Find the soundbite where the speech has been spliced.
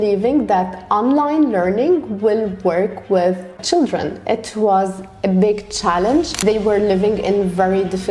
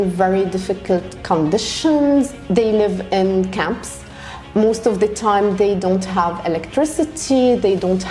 first; 2 cuts; at 3.5 s, 6.3 s

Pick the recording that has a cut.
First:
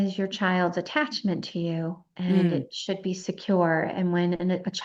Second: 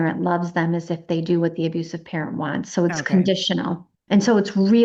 second; 1 cut; at 3.9 s

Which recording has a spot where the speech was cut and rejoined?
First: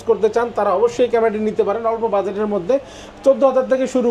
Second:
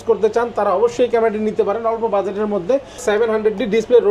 second; 1 cut; at 3.0 s

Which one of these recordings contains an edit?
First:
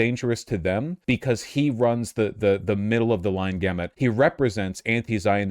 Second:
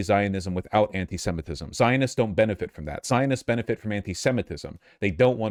first; 2 cuts; at 0.9 s, 3.9 s

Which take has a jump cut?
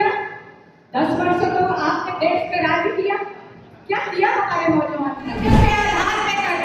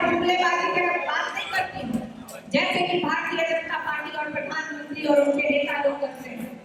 first; 1 cut; at 5.5 s

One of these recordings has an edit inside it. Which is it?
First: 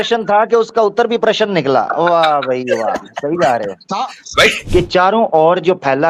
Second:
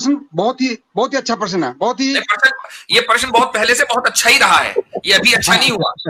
first; 1 cut; at 4.6 s

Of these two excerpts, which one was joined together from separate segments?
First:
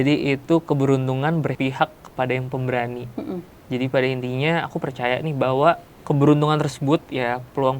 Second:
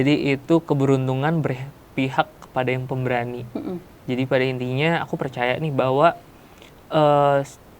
first; 2 cuts; at 1.5 s, 5.9 s

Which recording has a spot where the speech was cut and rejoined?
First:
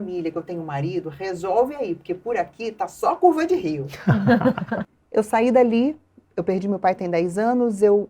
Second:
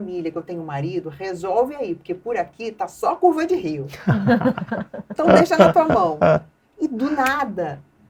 first; 1 cut; at 4.9 s

